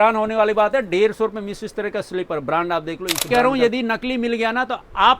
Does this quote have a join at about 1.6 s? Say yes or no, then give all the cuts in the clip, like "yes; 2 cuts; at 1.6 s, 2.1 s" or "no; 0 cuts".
no; 1 cut; at 3.3 s